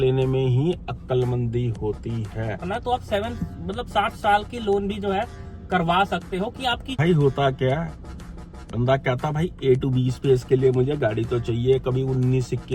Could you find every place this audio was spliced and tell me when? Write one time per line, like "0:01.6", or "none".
0:02.6
0:06.9